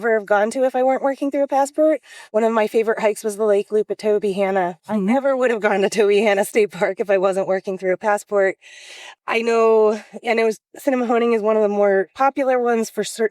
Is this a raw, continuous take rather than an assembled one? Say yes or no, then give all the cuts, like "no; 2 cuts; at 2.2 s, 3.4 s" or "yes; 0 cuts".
no; 1 cut; at 2.1 s